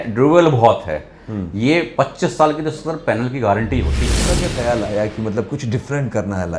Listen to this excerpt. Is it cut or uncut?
cut